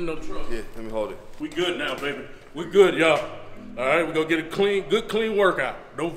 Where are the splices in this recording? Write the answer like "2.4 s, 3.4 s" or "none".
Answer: 1.3 s